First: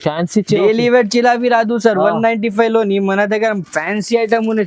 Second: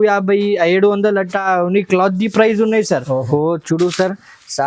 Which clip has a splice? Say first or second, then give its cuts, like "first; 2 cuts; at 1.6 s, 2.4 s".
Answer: second; 1 cut; at 3.3 s